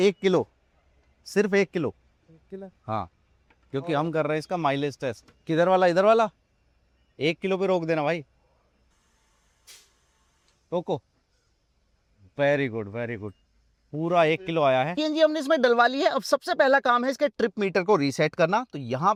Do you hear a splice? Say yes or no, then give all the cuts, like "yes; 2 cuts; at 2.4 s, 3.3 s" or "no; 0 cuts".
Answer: no; 0 cuts